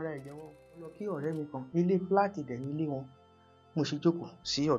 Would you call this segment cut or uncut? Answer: cut